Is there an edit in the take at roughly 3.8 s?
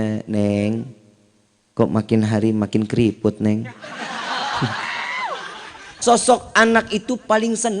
no; 1 cut; at 5.9 s

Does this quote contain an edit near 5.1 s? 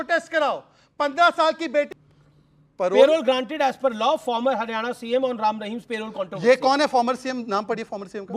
no; 1 cut; at 2.0 s

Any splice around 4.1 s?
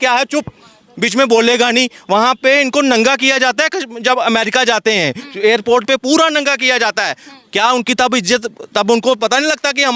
no; 0 cuts

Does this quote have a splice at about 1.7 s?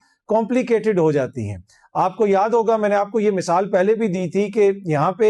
no; 0 cuts

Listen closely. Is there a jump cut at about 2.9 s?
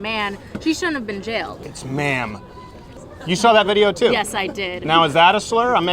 yes; 2 cuts; at 1.5 s, 2.9 s

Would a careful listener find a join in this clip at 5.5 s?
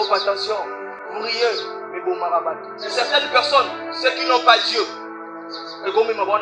no; 2 cuts; at 0.9 s, 2.7 s

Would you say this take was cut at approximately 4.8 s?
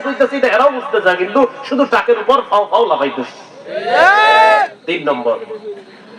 yes; 1 cut; at 4.8 s

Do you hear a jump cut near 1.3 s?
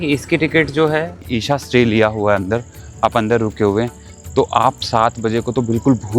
yes; 1 cut; at 1.3 s

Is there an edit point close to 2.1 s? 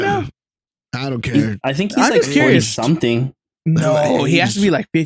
no; 0 cuts

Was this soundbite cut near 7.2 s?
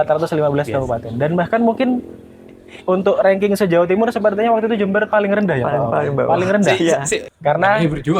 yes; 1 cut; at 7.2 s

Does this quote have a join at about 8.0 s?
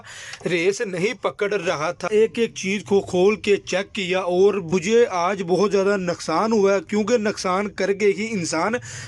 no; 2 cuts; at 2.1 s, 4.6 s

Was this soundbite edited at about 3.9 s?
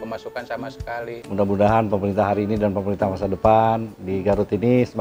no; 1 cut; at 1.2 s

